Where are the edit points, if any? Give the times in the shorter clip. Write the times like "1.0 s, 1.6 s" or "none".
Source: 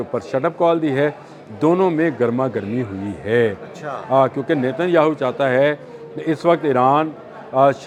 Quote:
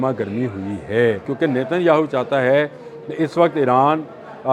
1.3 s